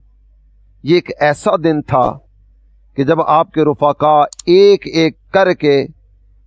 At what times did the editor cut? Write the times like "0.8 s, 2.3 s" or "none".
none